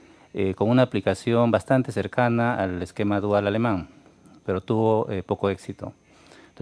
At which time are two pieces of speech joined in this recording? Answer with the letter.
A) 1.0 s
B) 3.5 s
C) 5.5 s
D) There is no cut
B